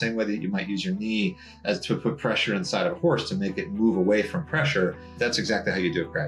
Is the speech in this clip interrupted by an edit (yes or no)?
yes